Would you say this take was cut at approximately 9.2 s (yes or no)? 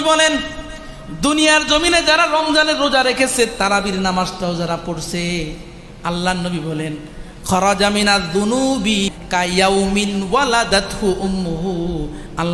yes